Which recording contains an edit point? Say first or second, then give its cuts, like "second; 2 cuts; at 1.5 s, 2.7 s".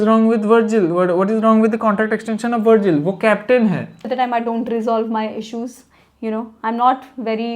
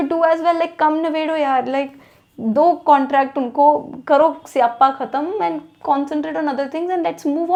first; 1 cut; at 4.1 s